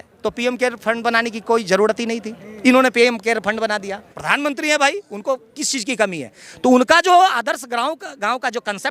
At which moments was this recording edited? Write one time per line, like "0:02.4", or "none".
0:04.2